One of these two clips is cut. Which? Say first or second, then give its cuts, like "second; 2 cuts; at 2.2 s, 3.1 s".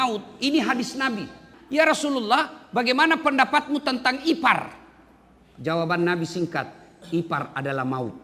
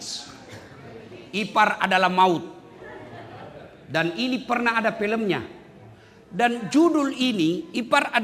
first; 1 cut; at 1.5 s